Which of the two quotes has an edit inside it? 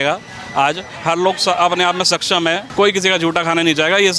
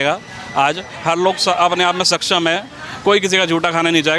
first; 1 cut; at 2.6 s

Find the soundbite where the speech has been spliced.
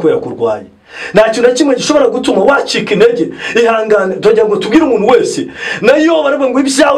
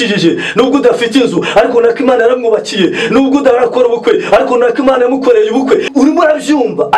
second; 1 cut; at 5.9 s

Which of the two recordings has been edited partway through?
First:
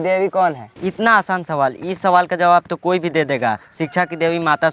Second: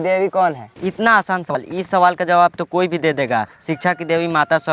second; 1 cut; at 1.6 s

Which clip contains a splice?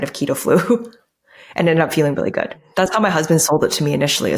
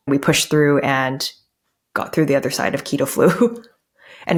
first; 1 cut; at 2.7 s

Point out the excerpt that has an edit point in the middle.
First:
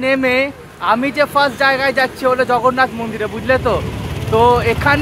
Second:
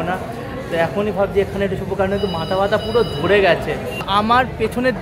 second; 1 cut; at 4.1 s

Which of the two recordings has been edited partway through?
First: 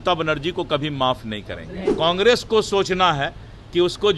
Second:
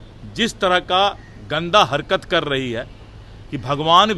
first; 1 cut; at 1.8 s

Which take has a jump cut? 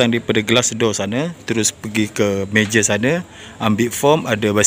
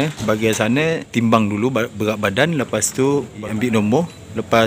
second; 2 cuts; at 1.1 s, 3.4 s

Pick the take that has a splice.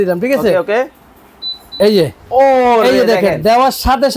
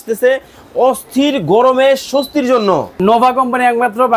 second; 1 cut; at 3.0 s

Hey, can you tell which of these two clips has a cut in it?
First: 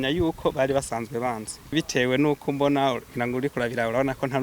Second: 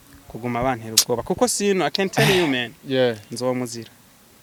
first; 1 cut; at 1.7 s

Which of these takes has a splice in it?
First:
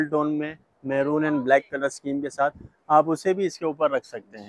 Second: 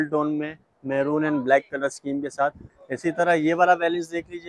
second; 1 cut; at 2.7 s

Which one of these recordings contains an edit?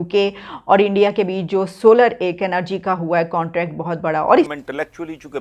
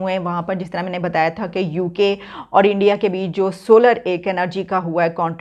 first; 1 cut; at 4.5 s

